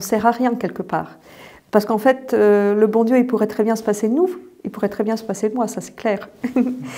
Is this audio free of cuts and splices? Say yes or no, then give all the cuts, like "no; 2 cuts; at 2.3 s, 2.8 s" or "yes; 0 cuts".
yes; 0 cuts